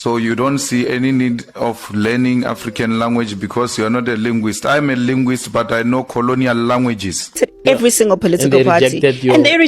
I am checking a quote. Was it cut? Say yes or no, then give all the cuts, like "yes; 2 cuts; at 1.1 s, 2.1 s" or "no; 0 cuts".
yes; 1 cut; at 7.4 s